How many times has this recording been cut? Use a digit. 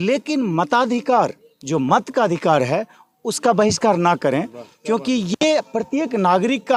0